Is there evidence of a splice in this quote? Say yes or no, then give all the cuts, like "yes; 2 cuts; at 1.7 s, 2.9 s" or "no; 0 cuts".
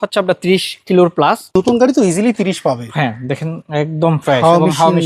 yes; 1 cut; at 1.5 s